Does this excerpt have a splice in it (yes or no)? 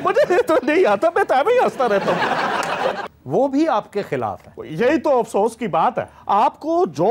yes